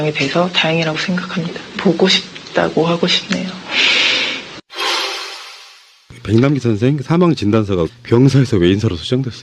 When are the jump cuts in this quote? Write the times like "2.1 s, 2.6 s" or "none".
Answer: 6.6 s